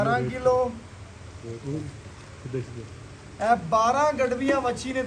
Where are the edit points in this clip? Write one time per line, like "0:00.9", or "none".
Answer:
none

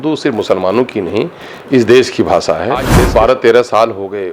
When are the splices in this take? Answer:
0:02.9

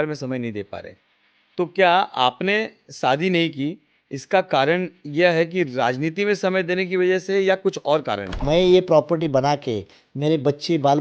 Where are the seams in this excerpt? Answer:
0:08.4

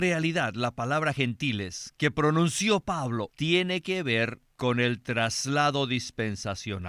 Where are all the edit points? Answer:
0:03.3
0:04.4

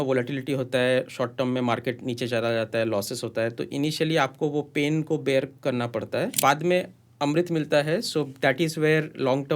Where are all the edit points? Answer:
0:06.3

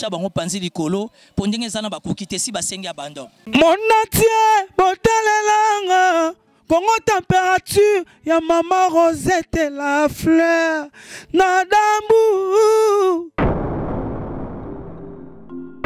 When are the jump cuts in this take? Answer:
0:03.4

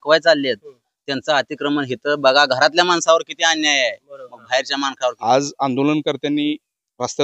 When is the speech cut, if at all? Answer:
0:05.2

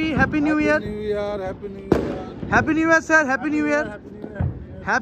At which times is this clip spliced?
none

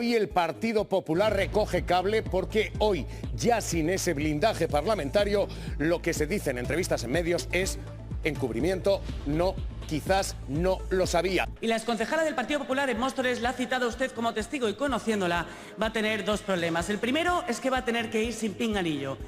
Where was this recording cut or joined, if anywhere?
0:11.5

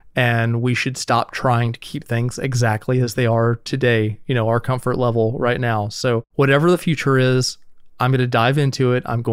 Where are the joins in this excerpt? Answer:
0:06.3

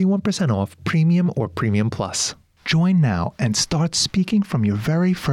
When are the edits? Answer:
0:02.3

